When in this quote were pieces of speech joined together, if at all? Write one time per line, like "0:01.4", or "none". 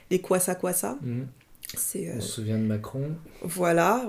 none